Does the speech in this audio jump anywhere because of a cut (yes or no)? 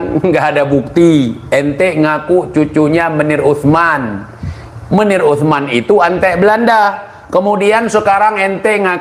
no